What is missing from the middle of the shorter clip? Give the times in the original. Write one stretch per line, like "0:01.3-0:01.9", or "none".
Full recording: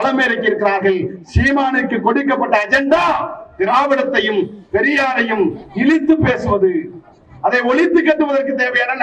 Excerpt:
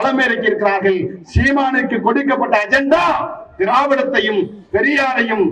none